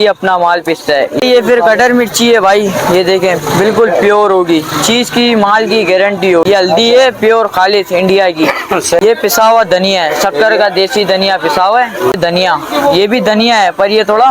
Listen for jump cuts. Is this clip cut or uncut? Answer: cut